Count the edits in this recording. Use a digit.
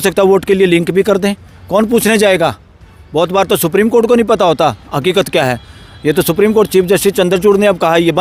0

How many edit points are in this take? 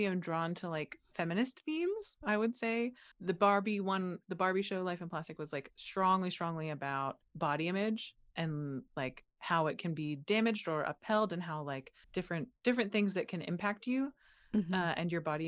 2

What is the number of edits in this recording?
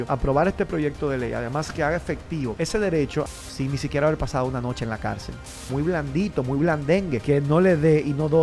2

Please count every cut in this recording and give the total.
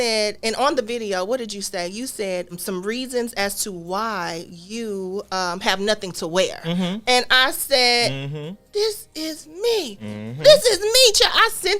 1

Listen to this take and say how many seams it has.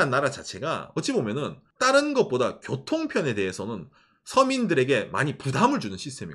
1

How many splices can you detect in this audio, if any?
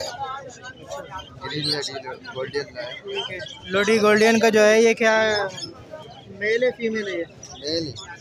0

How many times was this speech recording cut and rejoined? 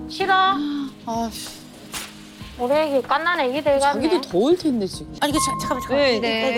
1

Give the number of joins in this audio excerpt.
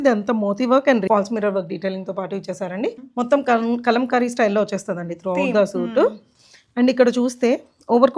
2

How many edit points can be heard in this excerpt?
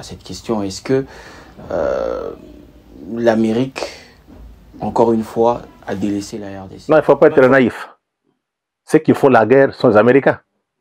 0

